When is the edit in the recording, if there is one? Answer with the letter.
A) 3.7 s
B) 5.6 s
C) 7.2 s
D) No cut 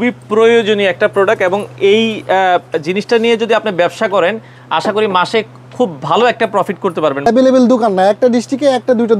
C